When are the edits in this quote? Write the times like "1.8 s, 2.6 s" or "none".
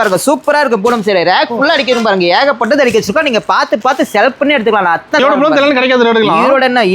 5.2 s